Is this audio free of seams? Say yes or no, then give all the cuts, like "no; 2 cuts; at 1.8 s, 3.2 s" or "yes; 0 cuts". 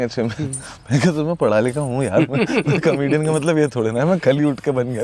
yes; 0 cuts